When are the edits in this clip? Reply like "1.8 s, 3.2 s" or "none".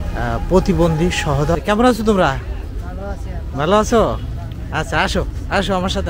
1.5 s